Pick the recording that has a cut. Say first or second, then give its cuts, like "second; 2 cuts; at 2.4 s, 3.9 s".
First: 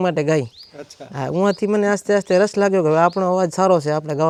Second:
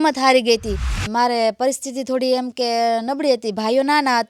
second; 1 cut; at 0.9 s